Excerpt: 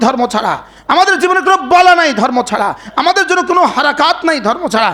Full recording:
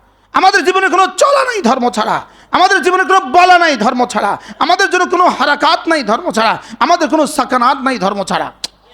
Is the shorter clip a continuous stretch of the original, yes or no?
yes